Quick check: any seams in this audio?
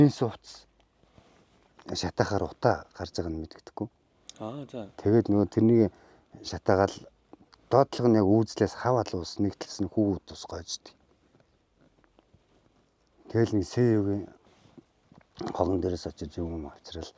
no; 0 cuts

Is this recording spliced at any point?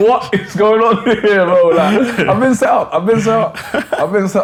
no; 0 cuts

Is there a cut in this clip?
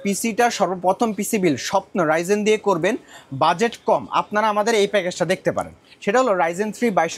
no; 0 cuts

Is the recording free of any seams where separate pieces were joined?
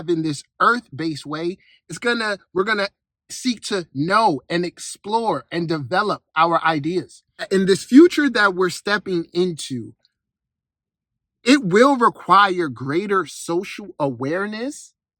no; 1 cut; at 7.5 s

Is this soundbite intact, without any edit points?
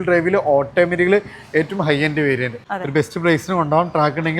no; 1 cut; at 2.6 s

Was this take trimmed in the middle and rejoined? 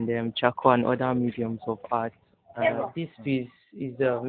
yes; 1 cut; at 3.0 s

